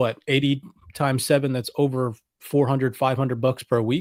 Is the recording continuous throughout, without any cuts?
yes; 0 cuts

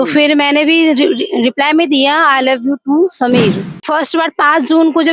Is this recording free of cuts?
no; 1 cut; at 3.8 s

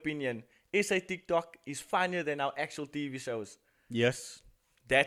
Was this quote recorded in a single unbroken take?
yes; 0 cuts

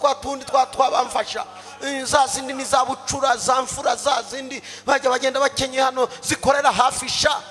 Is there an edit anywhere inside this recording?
no; 0 cuts

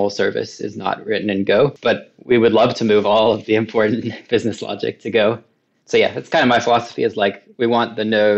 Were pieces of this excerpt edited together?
no; 0 cuts

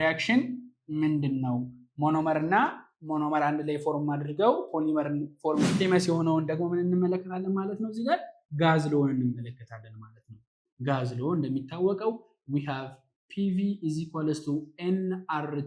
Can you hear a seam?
yes; 1 cut; at 5.6 s

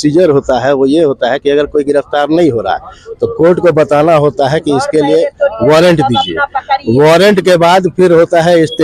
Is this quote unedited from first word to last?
yes; 0 cuts

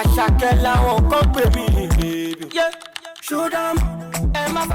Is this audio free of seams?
yes; 0 cuts

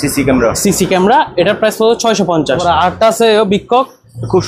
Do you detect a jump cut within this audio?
yes; 1 cut; at 2.6 s

